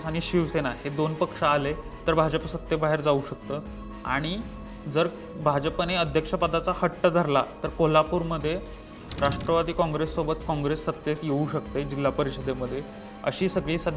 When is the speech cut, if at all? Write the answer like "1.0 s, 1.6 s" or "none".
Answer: none

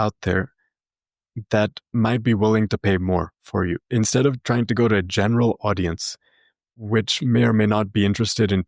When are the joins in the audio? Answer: 6.8 s

